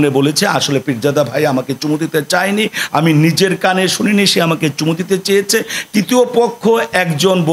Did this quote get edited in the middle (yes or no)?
no